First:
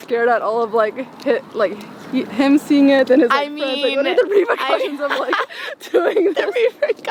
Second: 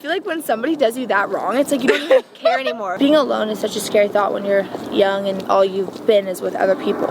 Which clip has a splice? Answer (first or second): second